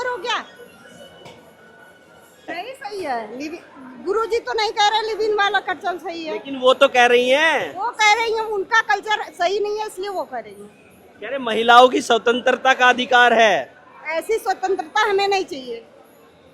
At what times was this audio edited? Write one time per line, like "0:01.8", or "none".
0:02.5